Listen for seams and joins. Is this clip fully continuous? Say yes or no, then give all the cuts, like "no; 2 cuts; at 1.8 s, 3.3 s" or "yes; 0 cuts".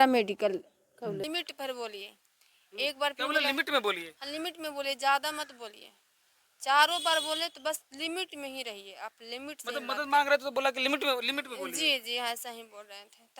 no; 1 cut; at 1.2 s